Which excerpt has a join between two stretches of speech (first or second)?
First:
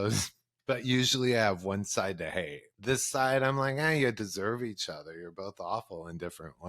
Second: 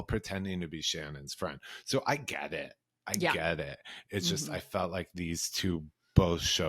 first